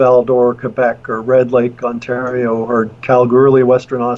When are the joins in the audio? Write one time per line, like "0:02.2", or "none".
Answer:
none